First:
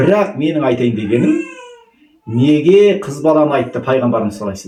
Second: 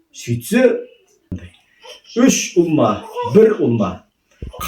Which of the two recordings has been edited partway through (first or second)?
second